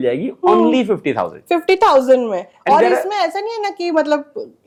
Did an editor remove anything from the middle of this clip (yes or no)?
no